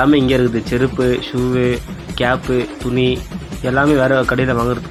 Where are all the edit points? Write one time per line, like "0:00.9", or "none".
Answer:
none